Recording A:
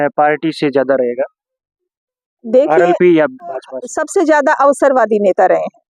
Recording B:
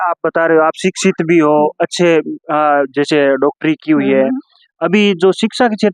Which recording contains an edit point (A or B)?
A